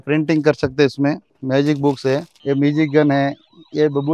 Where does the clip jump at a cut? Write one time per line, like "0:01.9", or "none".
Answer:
0:01.3
0:02.3